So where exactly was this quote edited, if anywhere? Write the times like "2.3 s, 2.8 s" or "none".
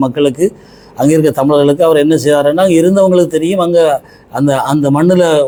none